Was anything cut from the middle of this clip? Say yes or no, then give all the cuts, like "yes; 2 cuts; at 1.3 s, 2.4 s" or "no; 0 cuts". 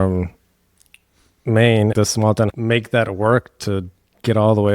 yes; 1 cut; at 2.0 s